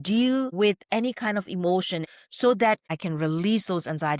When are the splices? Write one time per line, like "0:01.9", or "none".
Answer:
0:02.1
0:02.9